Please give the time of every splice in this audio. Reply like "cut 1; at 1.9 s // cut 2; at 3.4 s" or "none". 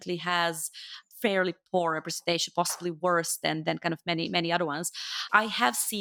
none

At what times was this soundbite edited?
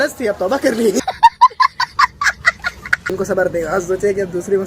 cut 1; at 3.1 s

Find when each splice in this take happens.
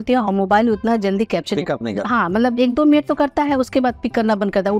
none

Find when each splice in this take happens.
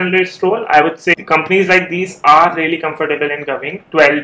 cut 1; at 1.2 s

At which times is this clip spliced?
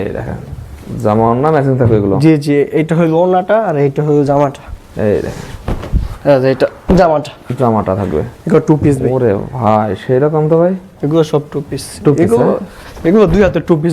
none

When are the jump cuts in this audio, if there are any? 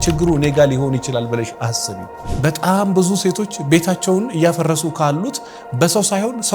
cut 1; at 2.1 s

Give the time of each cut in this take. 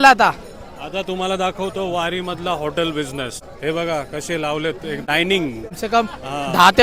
cut 1; at 3.4 s // cut 2; at 5.0 s // cut 3; at 5.8 s

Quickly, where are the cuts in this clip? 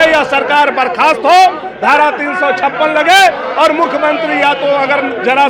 none

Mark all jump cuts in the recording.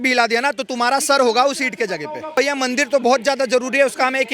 cut 1; at 2.4 s

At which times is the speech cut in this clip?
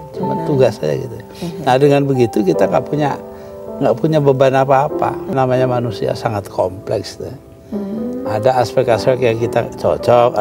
cut 1; at 5.3 s

